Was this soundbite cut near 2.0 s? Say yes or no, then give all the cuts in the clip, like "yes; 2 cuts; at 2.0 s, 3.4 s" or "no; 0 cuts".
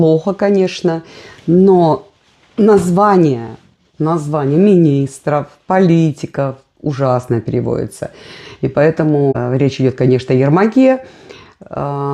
no; 0 cuts